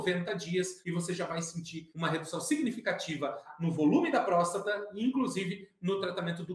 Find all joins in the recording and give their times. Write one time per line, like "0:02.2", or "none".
0:01.8
0:03.5